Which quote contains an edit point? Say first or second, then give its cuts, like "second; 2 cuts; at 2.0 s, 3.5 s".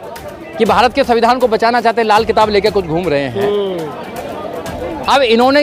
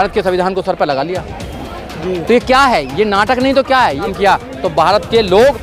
second; 1 cut; at 4.0 s